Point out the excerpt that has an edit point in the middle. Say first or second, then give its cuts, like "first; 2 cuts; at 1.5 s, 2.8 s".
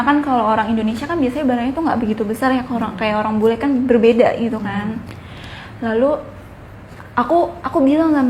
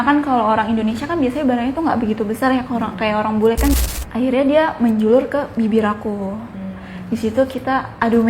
second; 1 cut; at 3.7 s